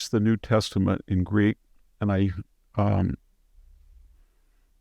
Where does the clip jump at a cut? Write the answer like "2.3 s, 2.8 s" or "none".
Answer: none

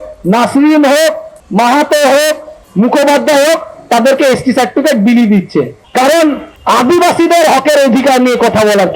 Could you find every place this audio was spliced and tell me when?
2.5 s, 5.8 s

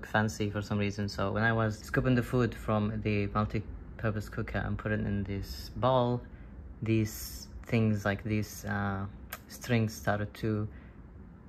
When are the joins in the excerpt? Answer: none

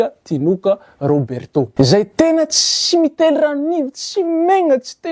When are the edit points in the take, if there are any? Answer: 1.7 s

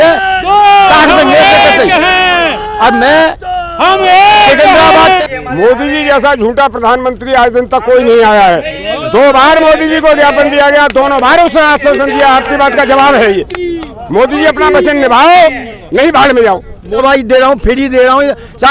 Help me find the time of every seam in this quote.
5.2 s, 17.0 s

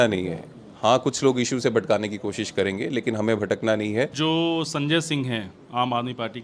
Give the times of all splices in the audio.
4.1 s

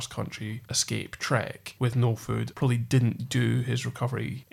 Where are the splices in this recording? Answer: 2.5 s

